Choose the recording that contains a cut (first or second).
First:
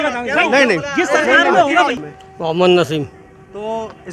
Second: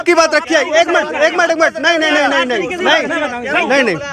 first